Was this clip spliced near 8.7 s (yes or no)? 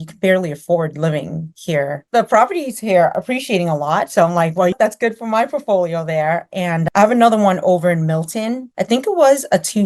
yes